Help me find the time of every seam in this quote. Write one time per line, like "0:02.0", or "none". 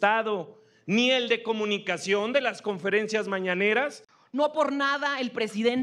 0:04.0